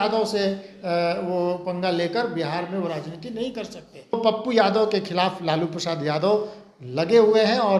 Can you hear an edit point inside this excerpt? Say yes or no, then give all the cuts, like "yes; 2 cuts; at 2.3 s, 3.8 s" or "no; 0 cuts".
yes; 1 cut; at 4.2 s